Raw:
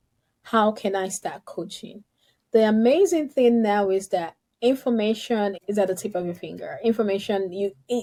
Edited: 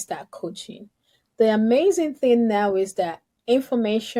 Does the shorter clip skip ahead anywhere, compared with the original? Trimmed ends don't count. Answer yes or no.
no